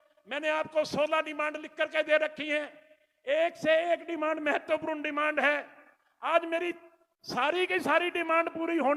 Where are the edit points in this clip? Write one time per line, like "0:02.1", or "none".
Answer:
none

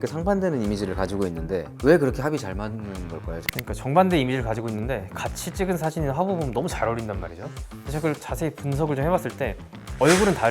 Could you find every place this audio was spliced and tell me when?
0:01.7
0:03.4

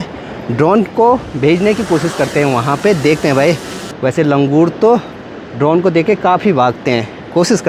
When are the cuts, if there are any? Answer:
none

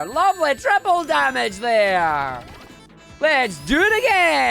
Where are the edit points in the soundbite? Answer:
none

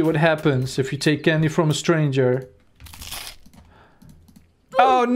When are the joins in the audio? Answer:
none

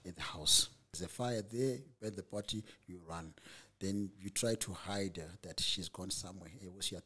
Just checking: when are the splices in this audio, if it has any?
0:01.0

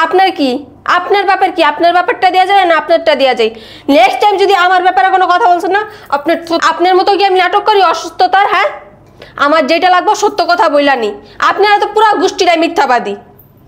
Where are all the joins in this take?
none

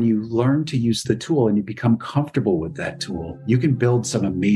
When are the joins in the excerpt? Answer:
none

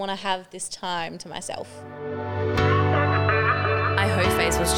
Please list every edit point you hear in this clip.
0:02.0

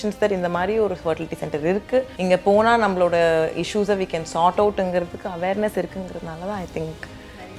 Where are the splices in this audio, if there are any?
0:02.1

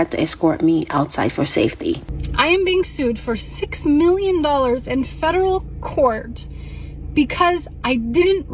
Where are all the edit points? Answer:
0:02.2

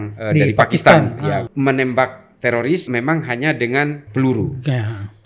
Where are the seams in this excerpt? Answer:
0:01.5
0:02.9
0:04.0

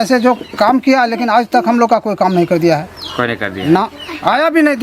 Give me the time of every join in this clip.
none

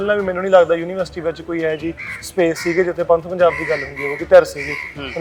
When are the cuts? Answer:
none

